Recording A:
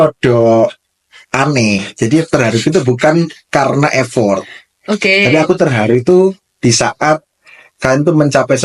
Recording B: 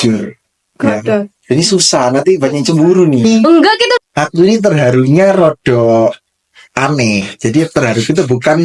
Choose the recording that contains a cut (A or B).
B